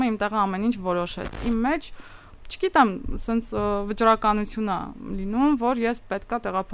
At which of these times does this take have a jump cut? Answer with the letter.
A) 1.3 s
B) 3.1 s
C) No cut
A